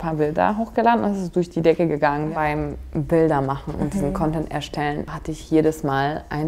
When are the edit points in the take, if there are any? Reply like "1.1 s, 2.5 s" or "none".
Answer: 2.3 s, 5.1 s